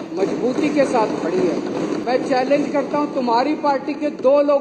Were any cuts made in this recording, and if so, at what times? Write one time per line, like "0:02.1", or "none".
0:02.0